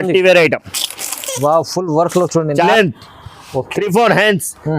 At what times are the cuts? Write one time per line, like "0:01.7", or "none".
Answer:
0:02.7